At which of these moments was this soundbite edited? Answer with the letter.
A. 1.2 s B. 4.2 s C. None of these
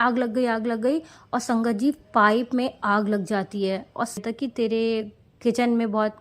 B